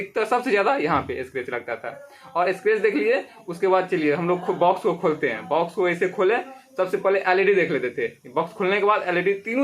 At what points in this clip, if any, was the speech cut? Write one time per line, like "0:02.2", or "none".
none